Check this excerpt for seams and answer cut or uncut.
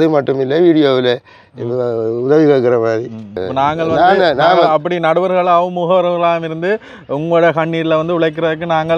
cut